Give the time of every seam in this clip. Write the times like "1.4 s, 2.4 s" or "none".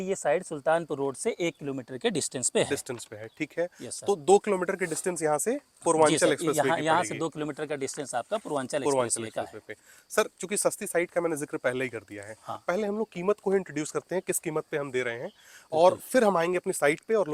none